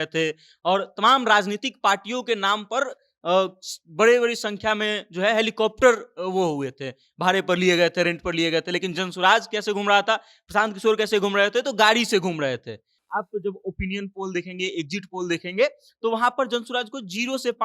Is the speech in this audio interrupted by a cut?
yes; 1 cut; at 12.9 s

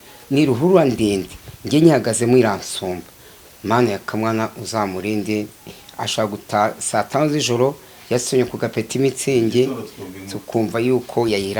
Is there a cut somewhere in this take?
no; 0 cuts

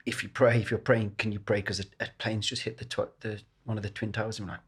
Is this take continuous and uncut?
yes; 0 cuts

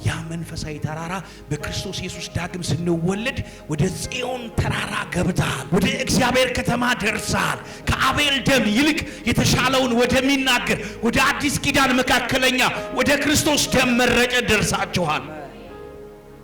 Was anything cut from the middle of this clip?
yes; 1 cut; at 5.6 s

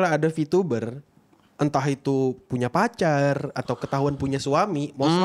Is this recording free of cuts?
yes; 0 cuts

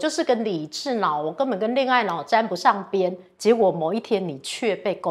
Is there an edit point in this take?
no; 0 cuts

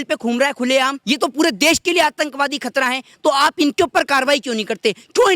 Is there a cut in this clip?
yes; 1 cut; at 1.0 s

